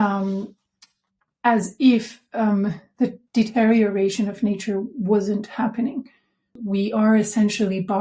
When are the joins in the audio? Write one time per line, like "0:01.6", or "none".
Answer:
0:06.5